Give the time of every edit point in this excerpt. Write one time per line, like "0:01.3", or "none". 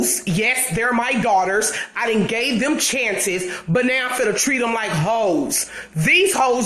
none

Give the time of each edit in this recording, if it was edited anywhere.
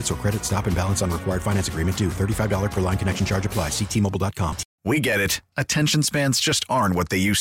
0:04.7

